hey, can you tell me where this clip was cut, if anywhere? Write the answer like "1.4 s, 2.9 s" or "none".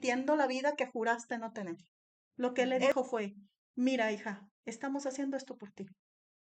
2.4 s